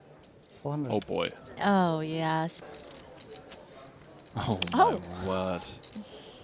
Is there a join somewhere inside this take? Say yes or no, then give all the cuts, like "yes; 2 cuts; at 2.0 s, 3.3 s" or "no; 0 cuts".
yes; 1 cut; at 2.6 s